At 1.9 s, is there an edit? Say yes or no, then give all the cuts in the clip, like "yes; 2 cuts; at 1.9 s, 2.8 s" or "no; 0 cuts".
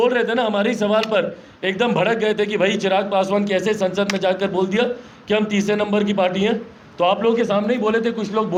no; 0 cuts